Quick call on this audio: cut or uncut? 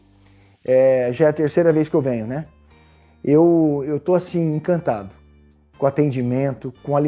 uncut